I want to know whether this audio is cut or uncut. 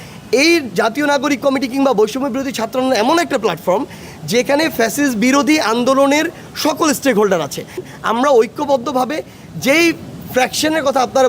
cut